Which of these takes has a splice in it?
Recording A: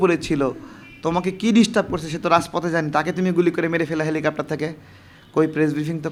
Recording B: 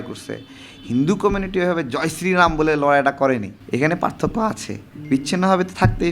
B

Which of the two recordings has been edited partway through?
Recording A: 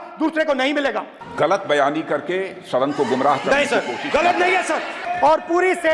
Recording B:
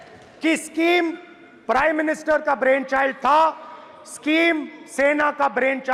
A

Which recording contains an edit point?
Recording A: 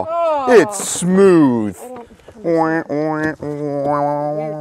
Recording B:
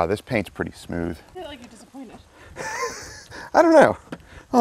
B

